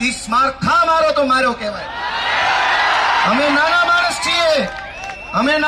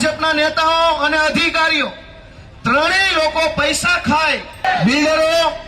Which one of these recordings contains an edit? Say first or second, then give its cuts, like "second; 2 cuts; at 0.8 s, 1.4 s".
second; 1 cut; at 4.6 s